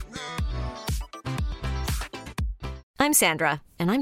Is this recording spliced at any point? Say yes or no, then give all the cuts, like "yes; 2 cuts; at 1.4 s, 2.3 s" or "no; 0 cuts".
no; 0 cuts